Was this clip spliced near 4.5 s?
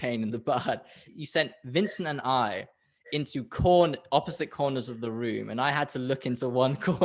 no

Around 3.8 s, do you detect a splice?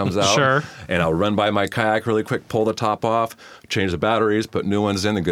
no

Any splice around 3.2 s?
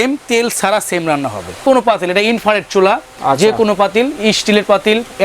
no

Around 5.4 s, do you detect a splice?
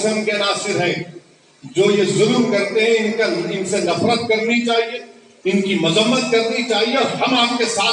no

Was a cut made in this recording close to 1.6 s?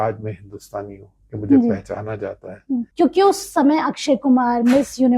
no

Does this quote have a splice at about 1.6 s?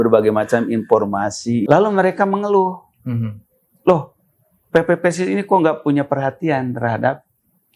yes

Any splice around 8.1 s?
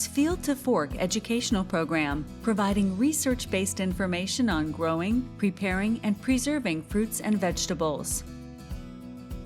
yes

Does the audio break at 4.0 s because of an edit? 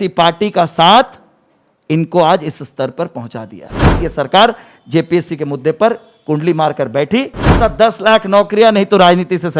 yes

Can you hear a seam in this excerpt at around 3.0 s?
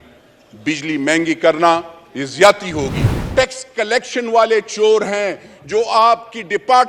yes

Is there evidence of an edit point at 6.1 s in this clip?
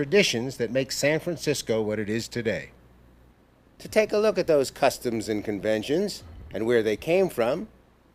yes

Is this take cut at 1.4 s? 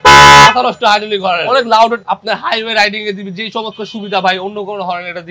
yes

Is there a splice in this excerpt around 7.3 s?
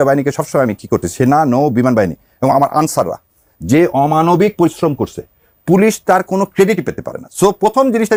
no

